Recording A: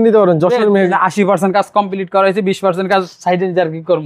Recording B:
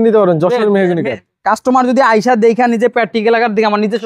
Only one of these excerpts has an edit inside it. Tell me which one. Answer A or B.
A